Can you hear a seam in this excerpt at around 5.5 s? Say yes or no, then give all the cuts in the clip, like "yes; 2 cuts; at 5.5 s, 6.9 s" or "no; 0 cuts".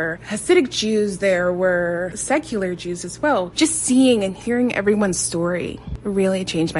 no; 2 cuts; at 2.2 s, 3.5 s